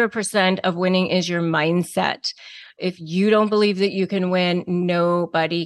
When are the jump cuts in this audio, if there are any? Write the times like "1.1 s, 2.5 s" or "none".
2.8 s